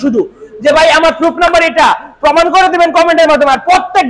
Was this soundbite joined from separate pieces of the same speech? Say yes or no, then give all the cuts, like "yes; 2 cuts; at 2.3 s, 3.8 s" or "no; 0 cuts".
no; 0 cuts